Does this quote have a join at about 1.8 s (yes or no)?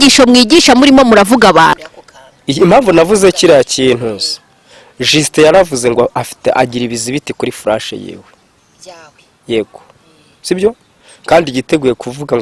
yes